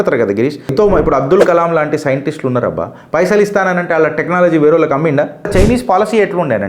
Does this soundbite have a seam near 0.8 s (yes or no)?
yes